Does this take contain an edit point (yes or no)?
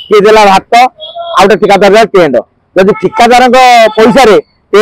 no